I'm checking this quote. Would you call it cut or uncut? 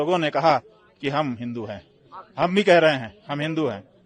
uncut